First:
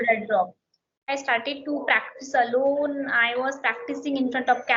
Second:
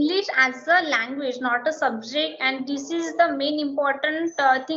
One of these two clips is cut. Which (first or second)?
first